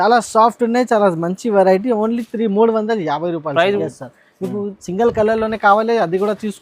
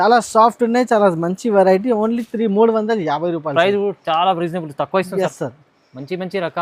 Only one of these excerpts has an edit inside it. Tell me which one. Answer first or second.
first